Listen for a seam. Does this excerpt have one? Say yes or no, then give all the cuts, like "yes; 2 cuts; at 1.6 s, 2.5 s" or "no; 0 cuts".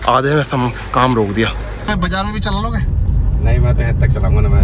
yes; 1 cut; at 1.8 s